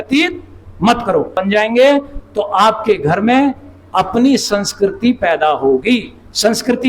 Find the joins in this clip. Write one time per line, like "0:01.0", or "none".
0:01.4